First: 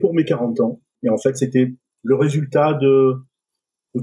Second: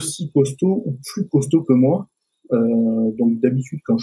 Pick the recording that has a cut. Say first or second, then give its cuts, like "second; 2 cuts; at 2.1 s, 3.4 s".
first; 2 cuts; at 0.9 s, 1.9 s